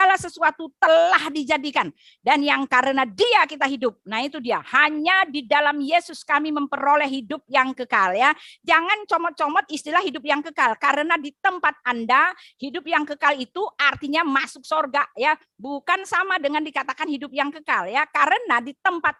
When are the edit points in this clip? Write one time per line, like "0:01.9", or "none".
none